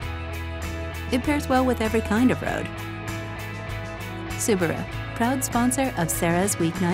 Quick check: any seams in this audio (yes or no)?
no